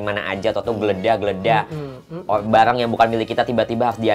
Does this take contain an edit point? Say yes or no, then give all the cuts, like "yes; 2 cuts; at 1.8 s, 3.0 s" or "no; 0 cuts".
no; 0 cuts